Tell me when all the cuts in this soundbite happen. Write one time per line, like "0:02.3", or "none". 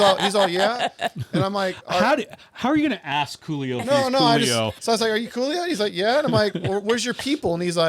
0:04.8